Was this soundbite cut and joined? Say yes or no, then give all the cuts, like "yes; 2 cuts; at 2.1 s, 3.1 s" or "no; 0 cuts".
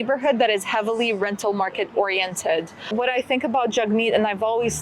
yes; 1 cut; at 2.9 s